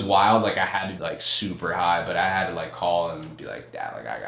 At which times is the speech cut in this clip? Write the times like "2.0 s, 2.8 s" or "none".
0.9 s